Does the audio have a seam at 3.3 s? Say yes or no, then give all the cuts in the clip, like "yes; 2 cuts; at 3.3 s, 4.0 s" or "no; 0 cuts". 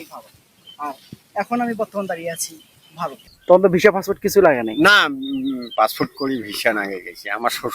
yes; 1 cut; at 3.3 s